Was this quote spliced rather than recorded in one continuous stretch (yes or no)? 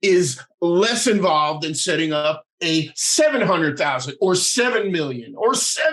yes